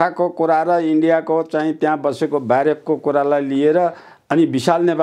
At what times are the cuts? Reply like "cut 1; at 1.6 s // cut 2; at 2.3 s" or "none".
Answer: none